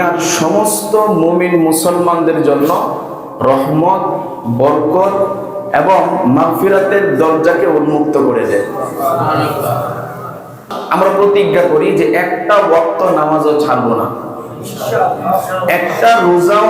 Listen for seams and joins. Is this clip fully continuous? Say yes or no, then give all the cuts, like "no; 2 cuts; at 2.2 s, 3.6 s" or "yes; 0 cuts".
no; 1 cut; at 10.7 s